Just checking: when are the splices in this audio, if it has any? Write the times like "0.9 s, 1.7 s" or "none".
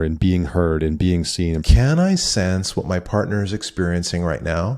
1.6 s